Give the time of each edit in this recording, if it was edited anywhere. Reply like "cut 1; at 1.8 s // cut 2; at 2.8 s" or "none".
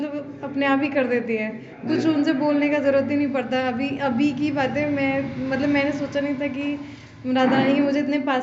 none